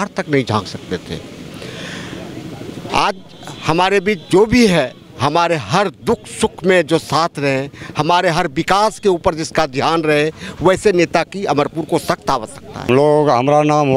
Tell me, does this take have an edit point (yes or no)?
no